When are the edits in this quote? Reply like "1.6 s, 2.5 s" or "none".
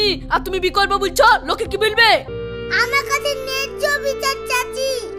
2.3 s